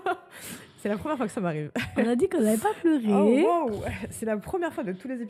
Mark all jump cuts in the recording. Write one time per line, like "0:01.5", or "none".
none